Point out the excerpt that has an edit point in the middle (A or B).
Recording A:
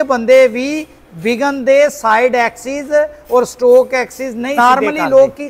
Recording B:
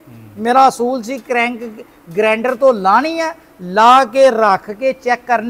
A